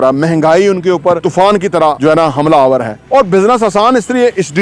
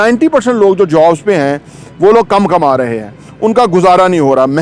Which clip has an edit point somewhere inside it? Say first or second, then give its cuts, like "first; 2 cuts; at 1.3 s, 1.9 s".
first; 3 cuts; at 1.2 s, 2.0 s, 2.9 s